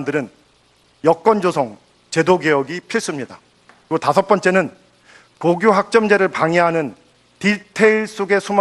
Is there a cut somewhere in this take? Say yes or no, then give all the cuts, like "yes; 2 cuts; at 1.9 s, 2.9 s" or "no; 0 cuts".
no; 0 cuts